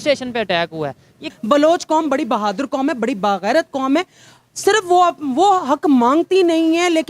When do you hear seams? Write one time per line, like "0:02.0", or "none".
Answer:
0:01.3

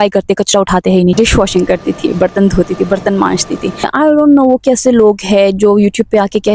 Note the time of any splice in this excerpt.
0:01.1
0:03.9

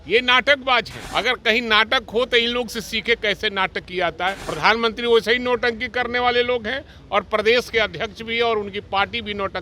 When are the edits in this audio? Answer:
0:01.0
0:04.4

